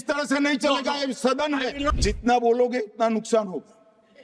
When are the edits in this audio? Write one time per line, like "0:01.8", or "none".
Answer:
0:01.9